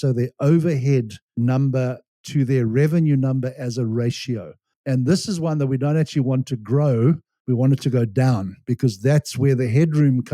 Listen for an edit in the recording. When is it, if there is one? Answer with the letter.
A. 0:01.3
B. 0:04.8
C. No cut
A